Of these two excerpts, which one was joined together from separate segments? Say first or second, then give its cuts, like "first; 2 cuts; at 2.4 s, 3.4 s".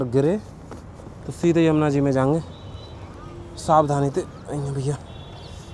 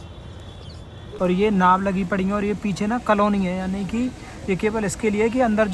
second; 1 cut; at 1.2 s